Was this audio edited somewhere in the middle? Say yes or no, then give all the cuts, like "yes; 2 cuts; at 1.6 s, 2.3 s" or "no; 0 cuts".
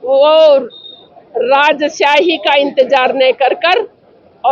no; 0 cuts